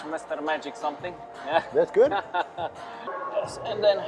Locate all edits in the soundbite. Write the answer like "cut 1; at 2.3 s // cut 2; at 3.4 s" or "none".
cut 1; at 3.1 s